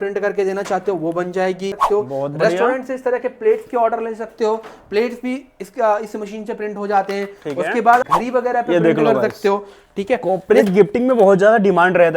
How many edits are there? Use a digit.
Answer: 2